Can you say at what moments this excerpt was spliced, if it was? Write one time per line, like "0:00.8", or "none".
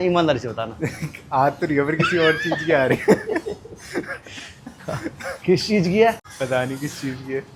none